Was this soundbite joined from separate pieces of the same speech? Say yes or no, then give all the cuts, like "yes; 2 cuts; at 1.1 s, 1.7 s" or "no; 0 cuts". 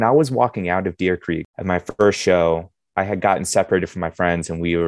yes; 1 cut; at 1.5 s